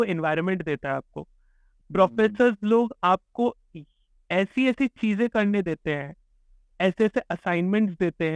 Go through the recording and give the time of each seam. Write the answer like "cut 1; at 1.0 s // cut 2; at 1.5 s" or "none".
none